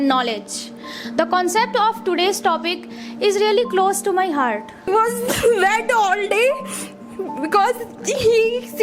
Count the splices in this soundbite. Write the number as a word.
one